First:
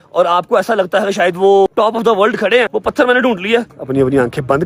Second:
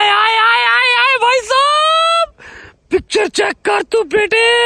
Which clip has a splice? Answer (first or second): first